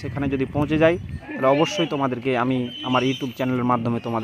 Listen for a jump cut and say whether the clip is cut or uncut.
uncut